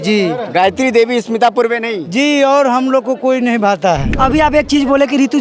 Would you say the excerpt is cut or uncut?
cut